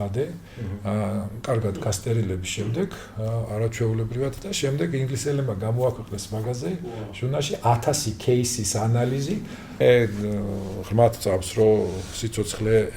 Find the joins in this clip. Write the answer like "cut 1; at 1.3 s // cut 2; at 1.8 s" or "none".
cut 1; at 9.6 s